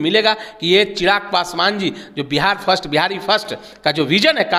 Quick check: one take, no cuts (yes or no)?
yes